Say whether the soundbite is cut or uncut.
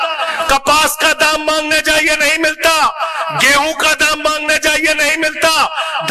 uncut